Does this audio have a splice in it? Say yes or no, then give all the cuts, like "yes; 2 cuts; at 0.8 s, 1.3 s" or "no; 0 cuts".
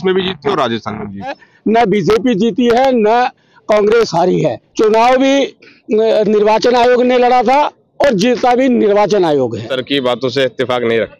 yes; 3 cuts; at 1.5 s, 4.6 s, 9.7 s